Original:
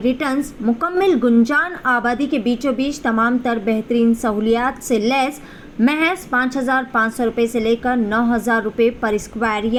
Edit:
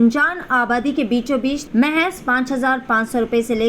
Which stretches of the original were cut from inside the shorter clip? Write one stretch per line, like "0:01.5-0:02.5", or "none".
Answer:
0:03.0-0:05.7